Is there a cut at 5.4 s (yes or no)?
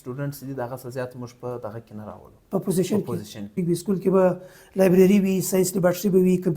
no